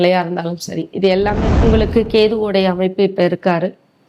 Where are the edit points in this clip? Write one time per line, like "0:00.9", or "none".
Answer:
0:01.6